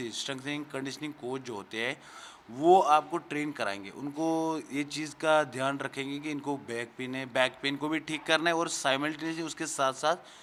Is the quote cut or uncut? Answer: uncut